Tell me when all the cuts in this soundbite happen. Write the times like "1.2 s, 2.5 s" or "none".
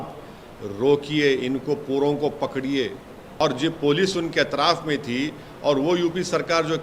3.2 s